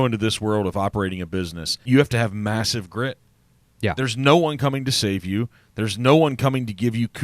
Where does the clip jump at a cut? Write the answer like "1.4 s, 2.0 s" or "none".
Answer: 1.8 s